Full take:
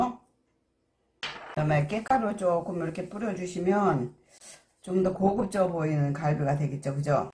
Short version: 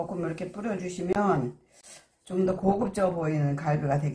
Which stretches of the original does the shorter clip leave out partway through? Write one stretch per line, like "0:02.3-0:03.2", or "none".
none